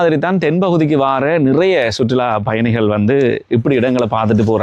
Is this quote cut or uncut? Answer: uncut